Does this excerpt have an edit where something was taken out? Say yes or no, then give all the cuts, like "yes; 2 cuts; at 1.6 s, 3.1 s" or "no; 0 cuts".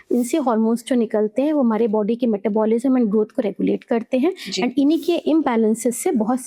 no; 0 cuts